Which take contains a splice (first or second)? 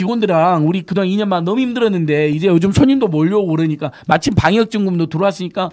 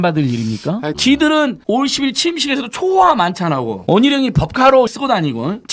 second